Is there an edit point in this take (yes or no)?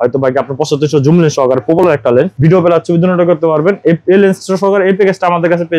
no